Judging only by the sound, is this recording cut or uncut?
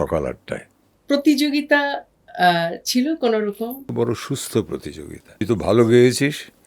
cut